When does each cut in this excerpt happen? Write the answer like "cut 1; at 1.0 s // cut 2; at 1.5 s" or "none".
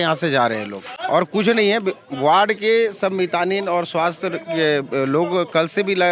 none